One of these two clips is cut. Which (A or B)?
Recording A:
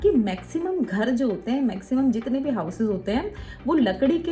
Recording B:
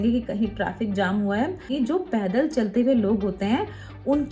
B